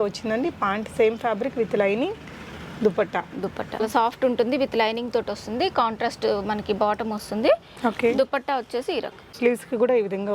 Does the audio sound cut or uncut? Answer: cut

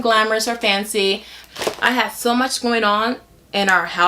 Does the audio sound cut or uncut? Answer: cut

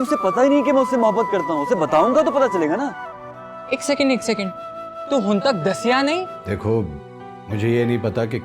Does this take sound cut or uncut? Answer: cut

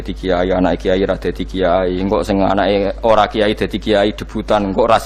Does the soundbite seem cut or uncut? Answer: uncut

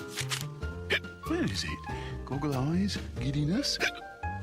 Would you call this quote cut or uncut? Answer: uncut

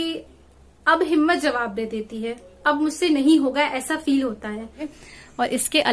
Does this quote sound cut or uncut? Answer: cut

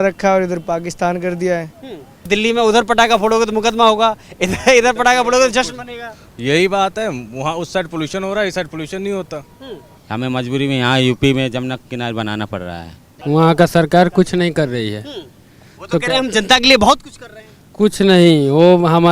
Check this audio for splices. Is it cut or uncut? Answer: cut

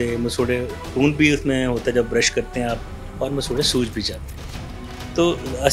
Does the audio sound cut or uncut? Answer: uncut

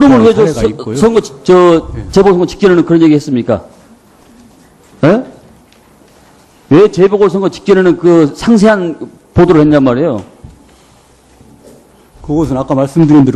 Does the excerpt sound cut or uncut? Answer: uncut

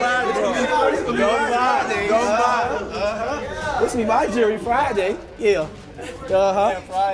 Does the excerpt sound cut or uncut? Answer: uncut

